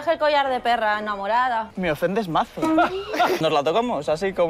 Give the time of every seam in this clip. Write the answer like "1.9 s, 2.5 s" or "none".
1.7 s, 3.4 s